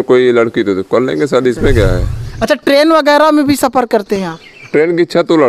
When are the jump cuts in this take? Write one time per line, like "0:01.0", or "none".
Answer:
0:02.2